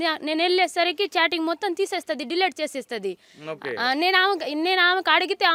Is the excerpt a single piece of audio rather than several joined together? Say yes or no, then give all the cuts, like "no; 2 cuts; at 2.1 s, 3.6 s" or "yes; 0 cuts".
yes; 0 cuts